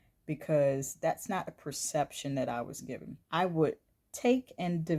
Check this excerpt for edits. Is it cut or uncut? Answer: cut